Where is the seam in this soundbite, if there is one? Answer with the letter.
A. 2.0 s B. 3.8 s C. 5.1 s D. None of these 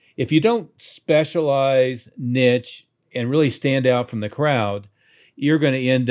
D